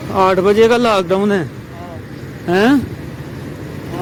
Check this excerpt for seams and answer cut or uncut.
uncut